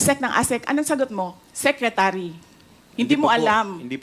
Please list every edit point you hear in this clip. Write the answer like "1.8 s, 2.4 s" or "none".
none